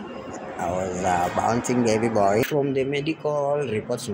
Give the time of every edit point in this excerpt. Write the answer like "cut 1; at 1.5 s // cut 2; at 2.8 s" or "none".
cut 1; at 2.4 s